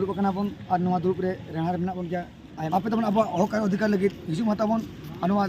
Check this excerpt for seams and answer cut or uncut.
cut